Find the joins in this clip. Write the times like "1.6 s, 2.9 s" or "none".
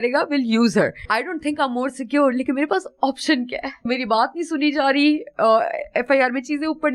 1.0 s, 3.8 s

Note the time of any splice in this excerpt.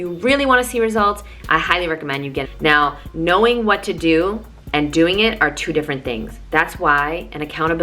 2.5 s

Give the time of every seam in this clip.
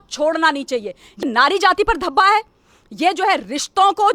1.2 s

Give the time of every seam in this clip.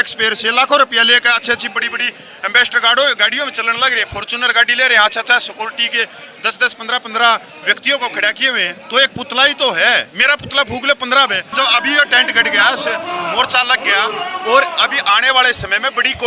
11.5 s

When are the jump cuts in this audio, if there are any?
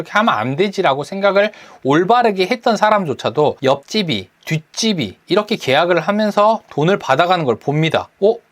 3.8 s, 5.2 s

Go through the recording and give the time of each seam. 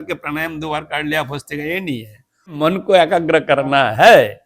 2.5 s

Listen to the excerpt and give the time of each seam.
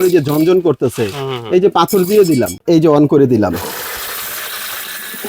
2.6 s

